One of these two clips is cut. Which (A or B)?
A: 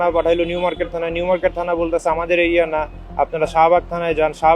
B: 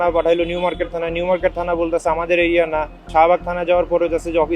B